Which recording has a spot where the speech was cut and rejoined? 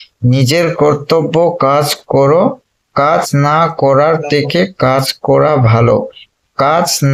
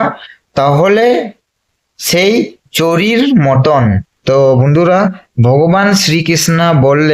second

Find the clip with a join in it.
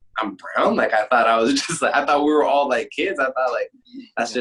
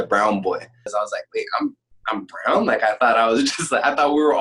second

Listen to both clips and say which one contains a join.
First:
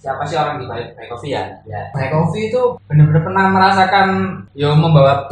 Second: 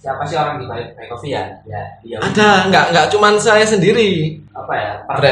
first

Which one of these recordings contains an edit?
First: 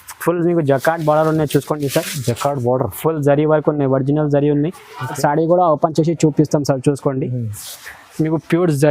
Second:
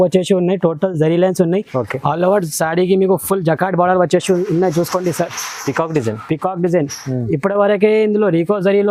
first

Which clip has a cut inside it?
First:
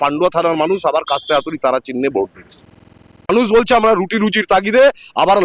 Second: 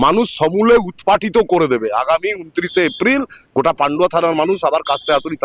first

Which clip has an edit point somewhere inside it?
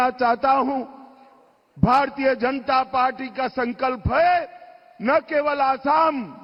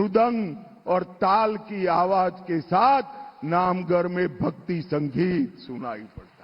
second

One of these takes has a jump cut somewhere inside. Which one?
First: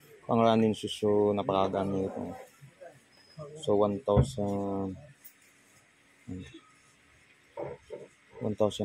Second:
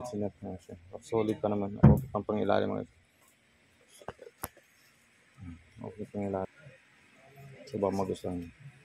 second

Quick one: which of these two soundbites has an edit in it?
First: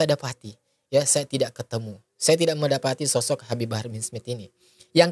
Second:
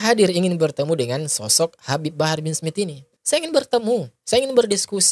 second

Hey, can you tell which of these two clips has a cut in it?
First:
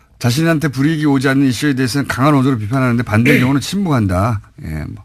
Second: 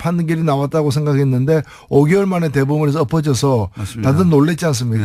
first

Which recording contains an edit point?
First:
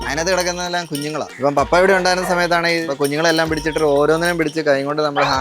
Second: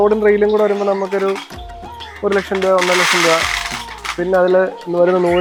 first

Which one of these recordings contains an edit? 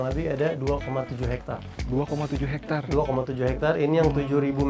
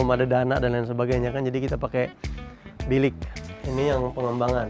second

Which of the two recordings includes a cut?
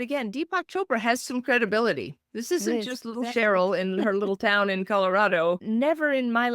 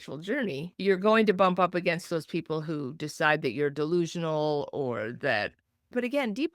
first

